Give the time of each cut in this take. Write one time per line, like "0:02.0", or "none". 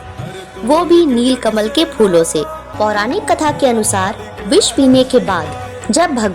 0:02.6